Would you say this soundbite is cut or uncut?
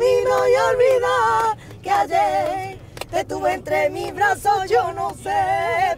uncut